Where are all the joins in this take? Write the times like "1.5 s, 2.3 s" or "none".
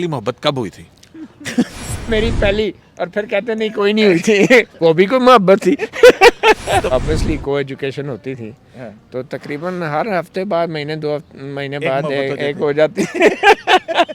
2.1 s, 6.9 s